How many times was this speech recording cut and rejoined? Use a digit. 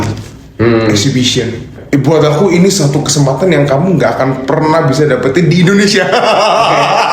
1